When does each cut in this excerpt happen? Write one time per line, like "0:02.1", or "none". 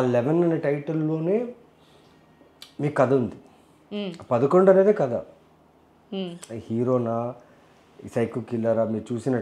none